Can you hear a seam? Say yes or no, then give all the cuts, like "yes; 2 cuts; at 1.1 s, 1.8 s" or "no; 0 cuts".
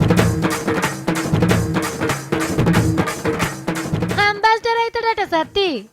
yes; 1 cut; at 2.1 s